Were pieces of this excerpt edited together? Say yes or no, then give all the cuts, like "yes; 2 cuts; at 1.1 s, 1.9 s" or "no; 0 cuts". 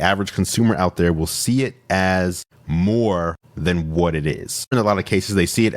yes; 1 cut; at 4.7 s